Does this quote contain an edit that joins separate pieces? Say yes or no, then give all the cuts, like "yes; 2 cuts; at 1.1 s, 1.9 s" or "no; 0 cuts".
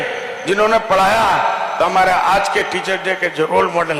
no; 0 cuts